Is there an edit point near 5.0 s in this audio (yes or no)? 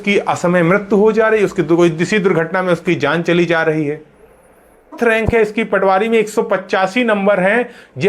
yes